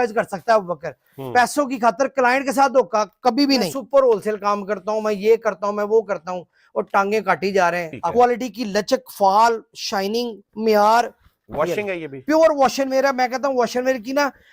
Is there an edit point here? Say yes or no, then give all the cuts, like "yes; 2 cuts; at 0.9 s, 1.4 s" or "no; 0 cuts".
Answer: yes; 2 cuts; at 3.8 s, 8.1 s